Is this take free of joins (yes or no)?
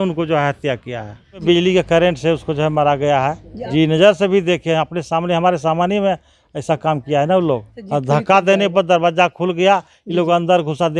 no